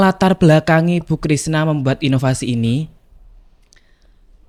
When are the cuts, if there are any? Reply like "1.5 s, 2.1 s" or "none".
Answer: none